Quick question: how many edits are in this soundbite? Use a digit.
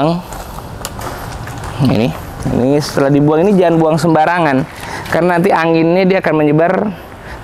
0